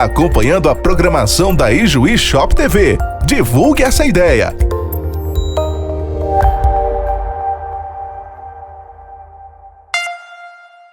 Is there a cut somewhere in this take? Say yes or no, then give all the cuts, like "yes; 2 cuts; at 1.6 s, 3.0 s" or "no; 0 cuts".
yes; 1 cut; at 10.0 s